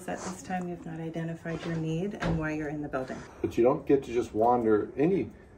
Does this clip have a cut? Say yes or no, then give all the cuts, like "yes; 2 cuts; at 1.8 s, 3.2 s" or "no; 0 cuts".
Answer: yes; 1 cut; at 3.2 s